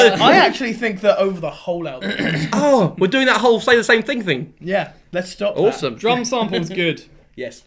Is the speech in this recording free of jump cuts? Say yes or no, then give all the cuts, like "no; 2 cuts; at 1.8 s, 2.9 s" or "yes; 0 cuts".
no; 1 cut; at 3.8 s